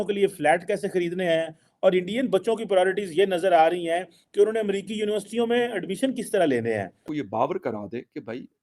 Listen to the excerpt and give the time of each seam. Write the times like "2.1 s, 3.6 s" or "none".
7.0 s